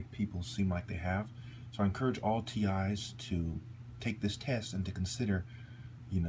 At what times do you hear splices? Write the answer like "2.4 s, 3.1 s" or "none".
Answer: none